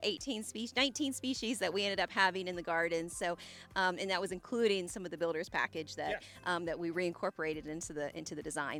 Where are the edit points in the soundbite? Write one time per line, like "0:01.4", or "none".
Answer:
none